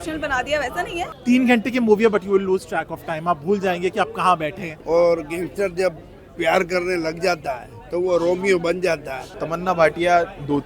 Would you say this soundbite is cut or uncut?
cut